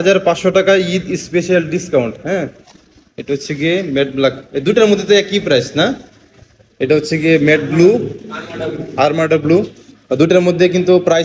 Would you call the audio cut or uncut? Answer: uncut